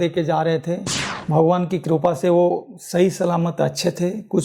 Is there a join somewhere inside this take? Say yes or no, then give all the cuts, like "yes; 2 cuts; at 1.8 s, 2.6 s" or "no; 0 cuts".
yes; 1 cut; at 1.1 s